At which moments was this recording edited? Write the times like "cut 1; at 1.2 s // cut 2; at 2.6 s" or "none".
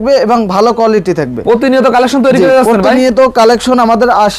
none